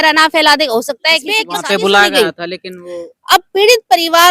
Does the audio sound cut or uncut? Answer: cut